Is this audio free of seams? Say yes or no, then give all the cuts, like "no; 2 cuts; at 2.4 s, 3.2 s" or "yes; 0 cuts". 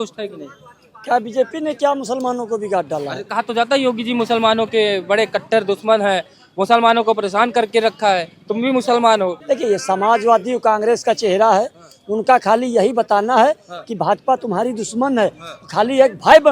no; 1 cut; at 9.4 s